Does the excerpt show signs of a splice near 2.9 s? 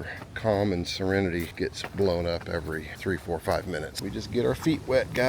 yes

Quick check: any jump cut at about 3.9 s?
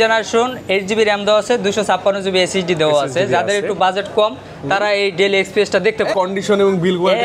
no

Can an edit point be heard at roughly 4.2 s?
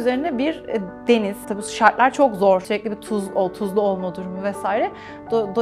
no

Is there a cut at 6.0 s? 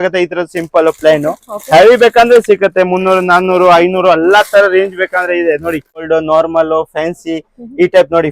yes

